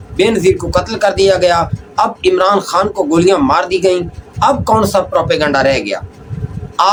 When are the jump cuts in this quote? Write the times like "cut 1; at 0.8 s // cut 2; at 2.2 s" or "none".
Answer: none